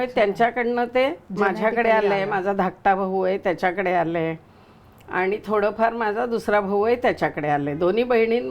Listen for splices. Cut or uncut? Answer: uncut